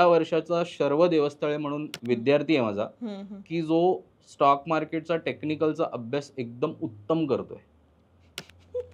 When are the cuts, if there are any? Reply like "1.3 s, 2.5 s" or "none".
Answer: 1.9 s